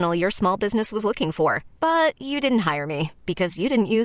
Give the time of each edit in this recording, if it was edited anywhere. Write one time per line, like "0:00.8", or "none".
none